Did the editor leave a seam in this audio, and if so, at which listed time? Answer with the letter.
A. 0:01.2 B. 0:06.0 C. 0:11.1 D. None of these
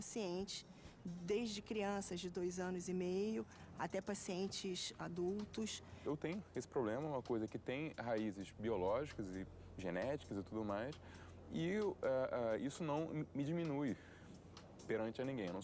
B